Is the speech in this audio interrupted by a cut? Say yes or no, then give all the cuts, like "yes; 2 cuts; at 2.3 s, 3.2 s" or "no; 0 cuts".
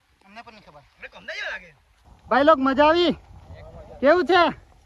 yes; 1 cut; at 2.1 s